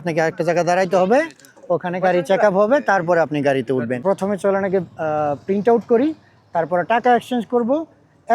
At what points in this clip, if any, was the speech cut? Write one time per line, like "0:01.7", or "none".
0:04.0